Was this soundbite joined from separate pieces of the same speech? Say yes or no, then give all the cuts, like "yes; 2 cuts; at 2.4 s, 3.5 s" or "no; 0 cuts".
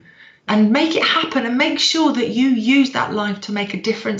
no; 0 cuts